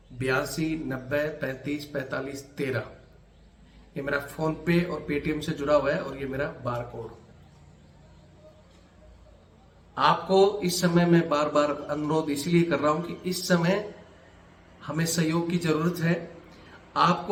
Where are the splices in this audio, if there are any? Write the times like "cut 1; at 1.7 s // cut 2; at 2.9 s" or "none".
none